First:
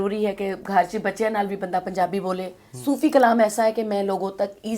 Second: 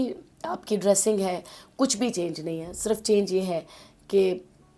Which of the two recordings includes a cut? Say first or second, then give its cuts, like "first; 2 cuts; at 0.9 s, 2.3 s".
first; 1 cut; at 2.7 s